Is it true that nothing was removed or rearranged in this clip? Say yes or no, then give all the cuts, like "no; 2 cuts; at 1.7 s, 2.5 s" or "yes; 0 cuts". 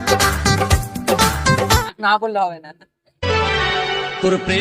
no; 1 cut; at 1.8 s